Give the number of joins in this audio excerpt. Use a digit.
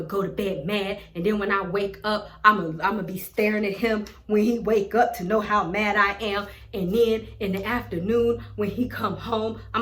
0